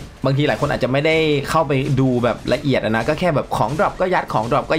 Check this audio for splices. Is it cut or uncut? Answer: uncut